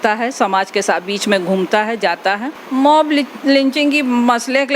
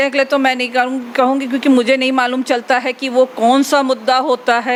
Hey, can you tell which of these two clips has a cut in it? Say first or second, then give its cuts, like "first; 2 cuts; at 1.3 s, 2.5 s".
first; 1 cut; at 2.6 s